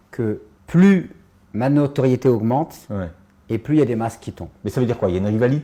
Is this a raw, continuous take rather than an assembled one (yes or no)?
yes